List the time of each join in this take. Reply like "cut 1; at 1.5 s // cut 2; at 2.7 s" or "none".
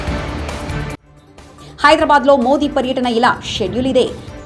cut 1; at 1.0 s